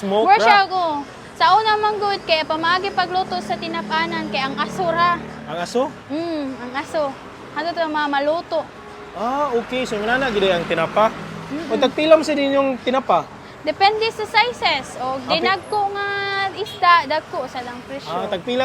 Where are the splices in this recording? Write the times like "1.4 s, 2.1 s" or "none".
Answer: none